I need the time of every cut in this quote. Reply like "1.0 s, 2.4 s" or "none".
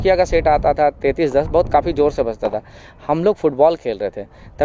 none